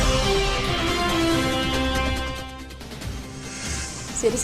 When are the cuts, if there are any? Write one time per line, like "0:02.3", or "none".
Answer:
0:03.3